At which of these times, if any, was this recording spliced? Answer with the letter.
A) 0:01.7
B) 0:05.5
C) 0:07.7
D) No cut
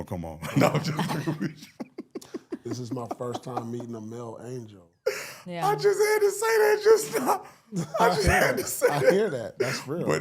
D